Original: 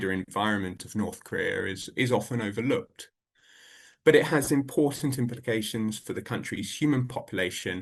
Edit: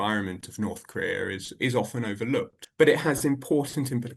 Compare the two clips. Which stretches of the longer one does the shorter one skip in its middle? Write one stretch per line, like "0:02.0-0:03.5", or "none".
0:03.0-0:03.9

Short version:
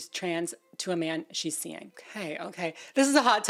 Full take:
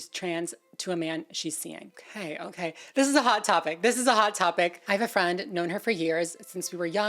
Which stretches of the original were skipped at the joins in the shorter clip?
none

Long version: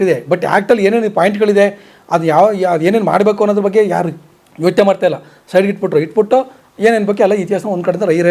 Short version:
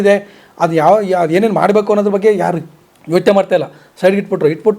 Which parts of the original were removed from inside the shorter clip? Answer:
none

